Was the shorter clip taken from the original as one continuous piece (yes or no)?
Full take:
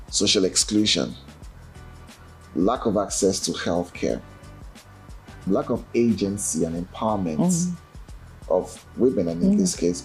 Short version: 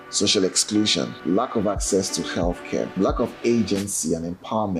no